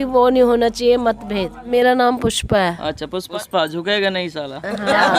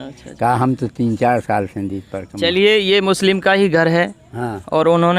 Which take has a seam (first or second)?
first